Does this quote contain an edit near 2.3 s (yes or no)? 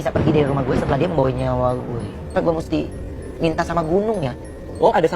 yes